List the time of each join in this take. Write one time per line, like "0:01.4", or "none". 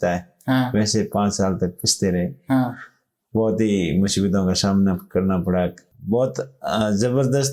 0:05.9